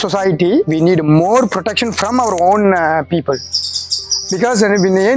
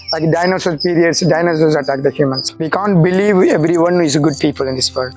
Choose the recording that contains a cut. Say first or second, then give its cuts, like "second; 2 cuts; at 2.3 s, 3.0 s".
second; 1 cut; at 2.5 s